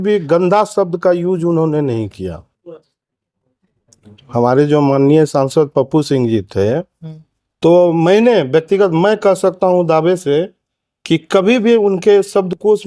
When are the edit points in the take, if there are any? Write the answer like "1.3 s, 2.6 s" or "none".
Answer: none